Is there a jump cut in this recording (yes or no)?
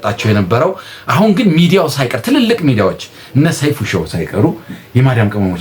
no